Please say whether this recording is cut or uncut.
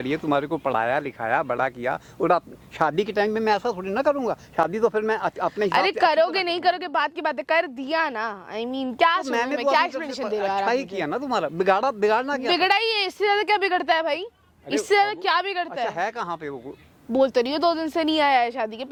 uncut